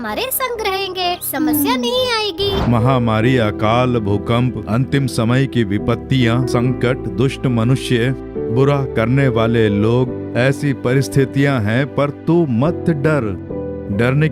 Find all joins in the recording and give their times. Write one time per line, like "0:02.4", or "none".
0:02.6